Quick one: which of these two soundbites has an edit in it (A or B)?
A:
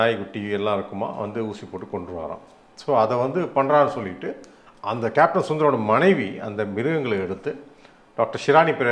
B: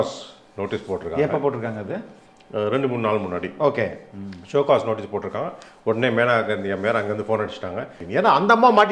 B